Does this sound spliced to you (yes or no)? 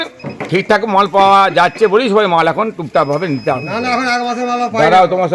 no